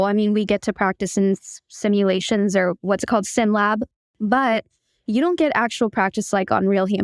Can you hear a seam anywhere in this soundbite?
yes; 1 cut; at 3.8 s

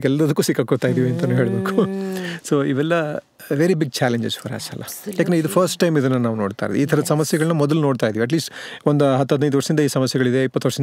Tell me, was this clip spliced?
no; 0 cuts

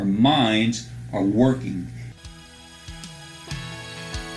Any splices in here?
yes; 1 cut; at 2.2 s

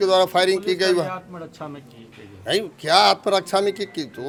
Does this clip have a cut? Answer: no; 0 cuts

